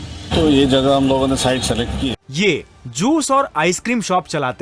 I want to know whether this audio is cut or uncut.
cut